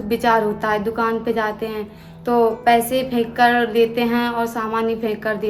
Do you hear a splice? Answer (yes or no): no